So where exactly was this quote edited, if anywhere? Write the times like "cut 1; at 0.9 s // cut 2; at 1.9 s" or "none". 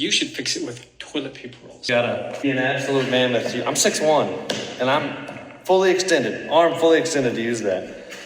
cut 1; at 1.8 s